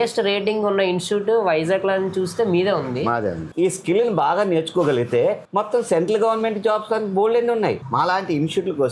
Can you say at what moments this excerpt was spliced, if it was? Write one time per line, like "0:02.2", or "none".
0:03.5
0:07.8

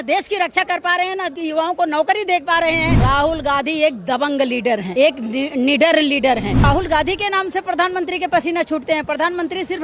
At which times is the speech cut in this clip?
0:01.3
0:02.9
0:04.9
0:06.6

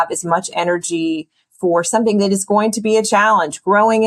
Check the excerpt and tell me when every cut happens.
none

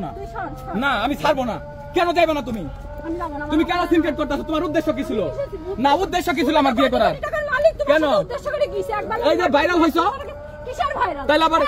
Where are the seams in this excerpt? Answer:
none

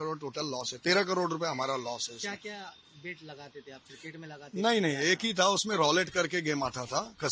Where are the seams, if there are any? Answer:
none

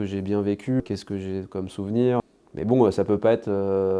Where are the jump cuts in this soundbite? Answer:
0:00.8
0:02.2

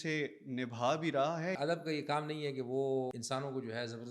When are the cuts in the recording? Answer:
0:01.6
0:03.2

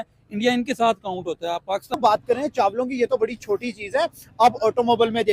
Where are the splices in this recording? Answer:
0:02.0

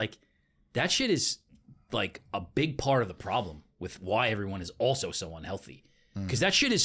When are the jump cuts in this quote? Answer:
none

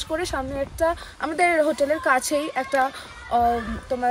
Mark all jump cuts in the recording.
none

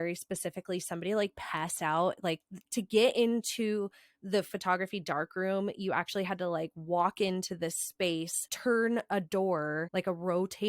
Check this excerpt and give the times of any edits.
0:08.4
0:09.8

